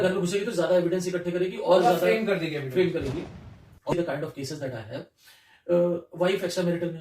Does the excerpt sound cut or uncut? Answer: cut